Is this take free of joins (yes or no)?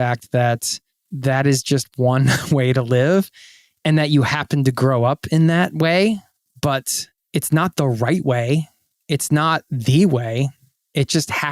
yes